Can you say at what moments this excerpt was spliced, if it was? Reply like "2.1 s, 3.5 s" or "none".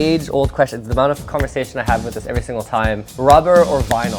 3.1 s